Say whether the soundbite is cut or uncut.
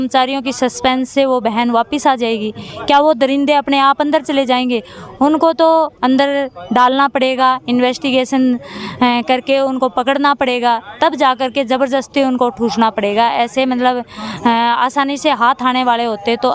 uncut